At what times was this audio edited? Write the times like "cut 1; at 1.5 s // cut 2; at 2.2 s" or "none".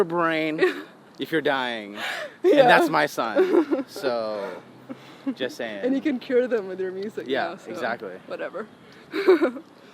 none